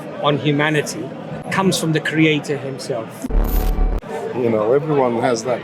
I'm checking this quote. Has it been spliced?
yes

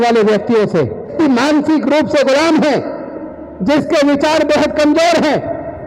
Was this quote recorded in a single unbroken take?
no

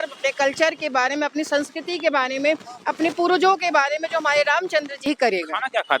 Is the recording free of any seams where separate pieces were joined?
no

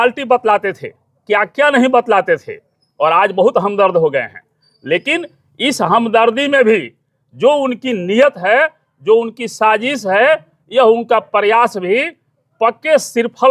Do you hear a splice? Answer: no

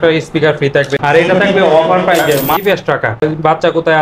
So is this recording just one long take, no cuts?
no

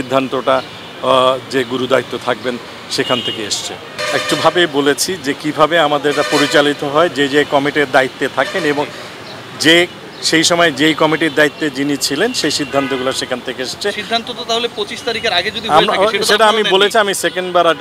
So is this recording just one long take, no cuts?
yes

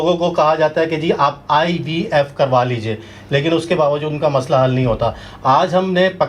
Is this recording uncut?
yes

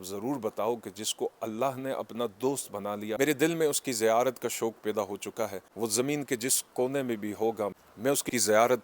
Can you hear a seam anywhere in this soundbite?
yes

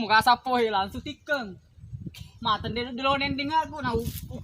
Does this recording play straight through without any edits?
yes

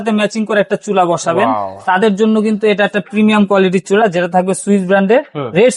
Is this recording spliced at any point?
no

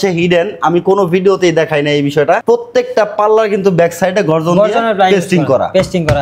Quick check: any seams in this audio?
no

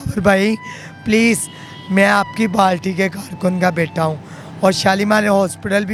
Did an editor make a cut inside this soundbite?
no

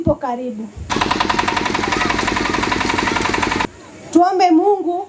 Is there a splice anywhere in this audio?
no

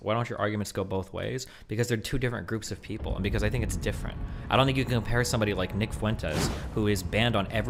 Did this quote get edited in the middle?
no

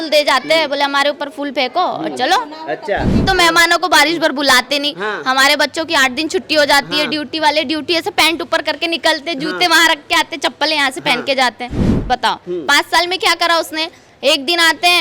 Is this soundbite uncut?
no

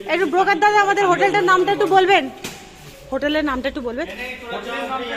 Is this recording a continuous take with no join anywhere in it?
yes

